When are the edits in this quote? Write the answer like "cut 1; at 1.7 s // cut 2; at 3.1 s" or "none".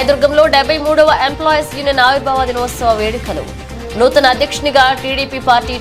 none